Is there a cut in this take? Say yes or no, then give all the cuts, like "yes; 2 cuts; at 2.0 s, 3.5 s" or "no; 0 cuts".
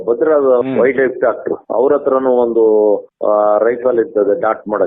no; 0 cuts